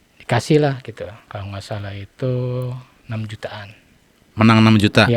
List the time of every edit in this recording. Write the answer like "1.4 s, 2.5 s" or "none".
1.3 s, 2.9 s